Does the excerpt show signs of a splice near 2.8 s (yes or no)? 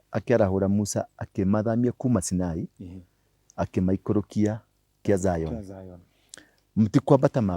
no